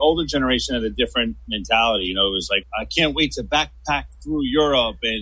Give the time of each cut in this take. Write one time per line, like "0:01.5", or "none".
none